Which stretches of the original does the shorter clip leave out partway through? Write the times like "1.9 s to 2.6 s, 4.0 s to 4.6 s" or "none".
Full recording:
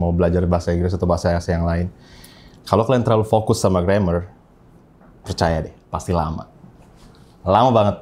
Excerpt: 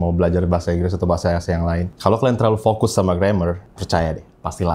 1.9 s to 2.6 s, 4.4 s to 5.2 s